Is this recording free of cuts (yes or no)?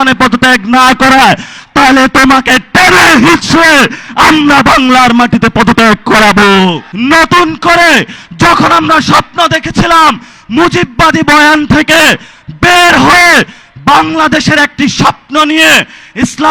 no